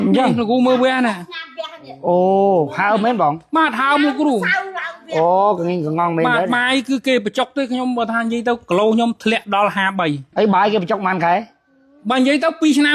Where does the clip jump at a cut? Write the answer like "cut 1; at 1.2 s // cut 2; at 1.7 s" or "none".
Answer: cut 1; at 10.3 s